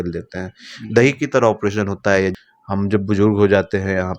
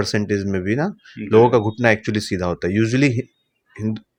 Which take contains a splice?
first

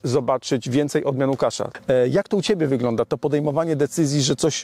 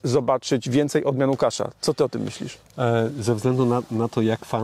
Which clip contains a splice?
first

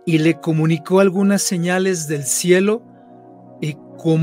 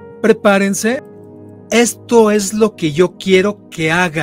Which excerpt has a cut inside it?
second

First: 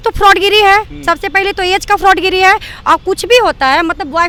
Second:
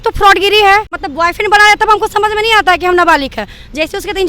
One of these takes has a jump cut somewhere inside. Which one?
second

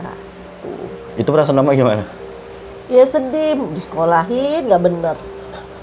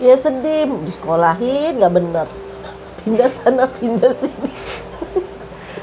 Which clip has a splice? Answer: first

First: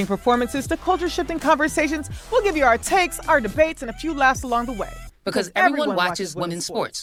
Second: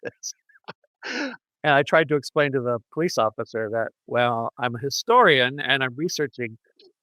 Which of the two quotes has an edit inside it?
second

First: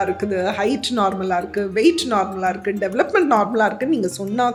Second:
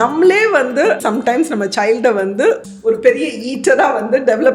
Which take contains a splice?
second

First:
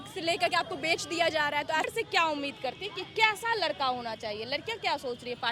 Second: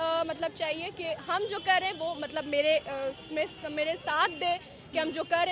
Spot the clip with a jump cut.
first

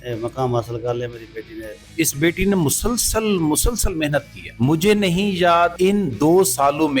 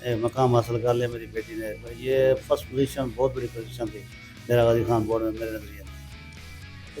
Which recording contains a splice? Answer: first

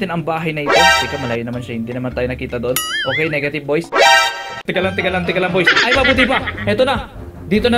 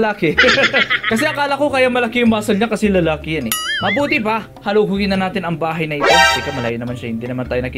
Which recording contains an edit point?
first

